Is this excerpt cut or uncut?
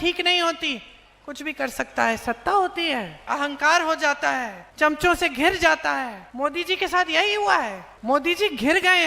cut